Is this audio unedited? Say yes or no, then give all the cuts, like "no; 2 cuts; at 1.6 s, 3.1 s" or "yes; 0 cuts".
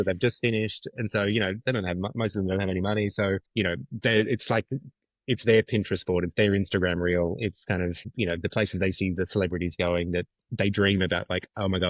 yes; 0 cuts